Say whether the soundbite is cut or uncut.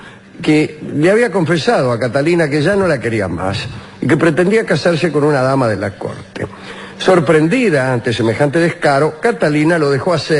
cut